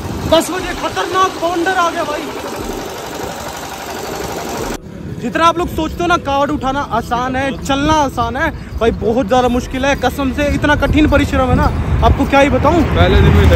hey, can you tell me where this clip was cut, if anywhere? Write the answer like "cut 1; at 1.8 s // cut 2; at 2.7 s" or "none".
cut 1; at 4.8 s